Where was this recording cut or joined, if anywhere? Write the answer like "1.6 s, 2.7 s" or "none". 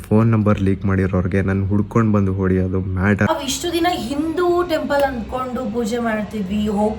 3.3 s